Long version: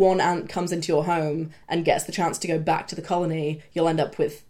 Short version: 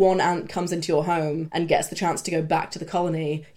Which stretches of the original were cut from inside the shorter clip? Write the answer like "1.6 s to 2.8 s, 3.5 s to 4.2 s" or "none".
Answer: 1.5 s to 1.6 s